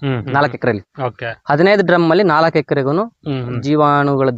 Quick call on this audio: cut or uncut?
uncut